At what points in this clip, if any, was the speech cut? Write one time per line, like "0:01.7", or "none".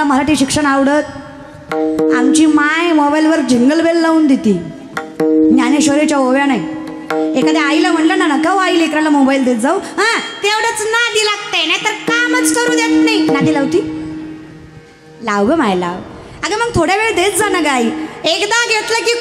none

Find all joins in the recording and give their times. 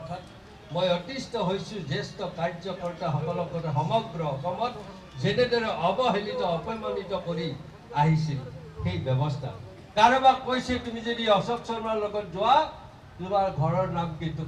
0:09.7

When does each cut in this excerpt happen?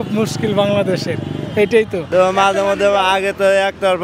0:02.0

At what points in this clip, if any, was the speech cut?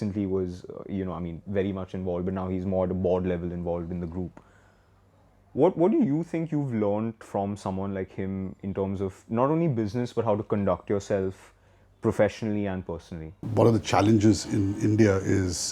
0:13.3

